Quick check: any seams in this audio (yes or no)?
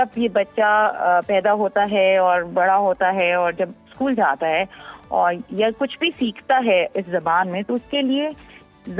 no